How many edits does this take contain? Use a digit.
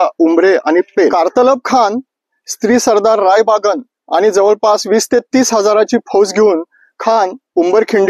1